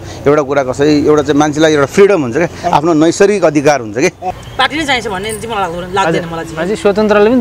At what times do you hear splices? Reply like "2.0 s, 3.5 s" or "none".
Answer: 4.4 s

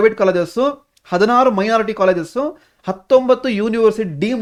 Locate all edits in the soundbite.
none

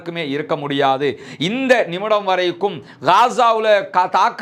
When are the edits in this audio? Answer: none

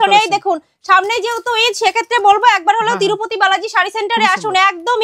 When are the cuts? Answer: none

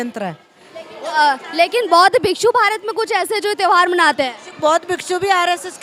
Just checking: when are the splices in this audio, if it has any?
none

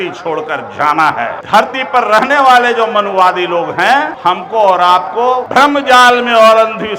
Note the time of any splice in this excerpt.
1.4 s, 4.1 s, 5.4 s

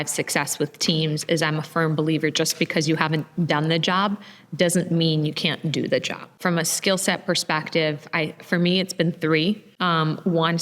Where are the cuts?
6.4 s, 9.7 s

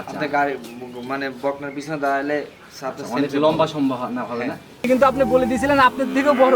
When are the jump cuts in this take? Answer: 4.9 s

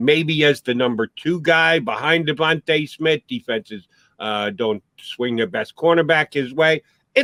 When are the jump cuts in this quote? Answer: none

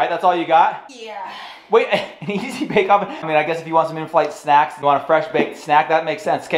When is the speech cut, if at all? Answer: none

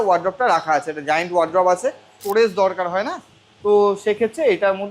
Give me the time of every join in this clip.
2.2 s

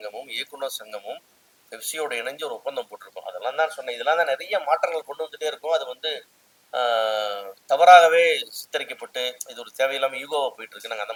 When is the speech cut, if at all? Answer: none

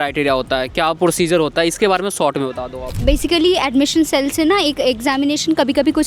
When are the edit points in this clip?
none

